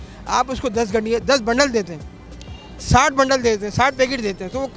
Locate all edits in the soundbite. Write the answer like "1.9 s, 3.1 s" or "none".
none